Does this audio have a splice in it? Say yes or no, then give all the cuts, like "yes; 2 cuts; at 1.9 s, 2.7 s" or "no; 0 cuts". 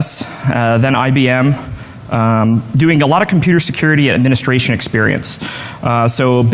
yes; 1 cut; at 3.6 s